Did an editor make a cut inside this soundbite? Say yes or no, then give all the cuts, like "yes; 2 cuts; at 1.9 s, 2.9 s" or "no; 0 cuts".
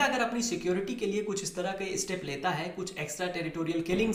no; 0 cuts